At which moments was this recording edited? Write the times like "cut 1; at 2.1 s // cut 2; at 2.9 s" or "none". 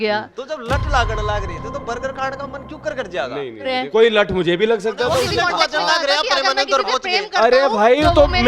cut 1; at 3.8 s // cut 2; at 5.3 s